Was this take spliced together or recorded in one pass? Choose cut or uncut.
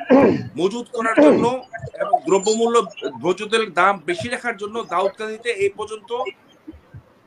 uncut